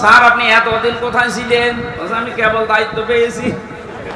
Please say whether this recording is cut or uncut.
uncut